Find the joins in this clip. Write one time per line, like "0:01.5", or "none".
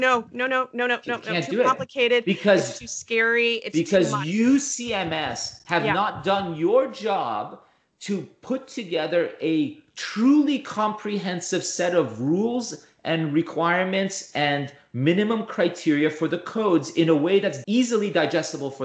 0:17.6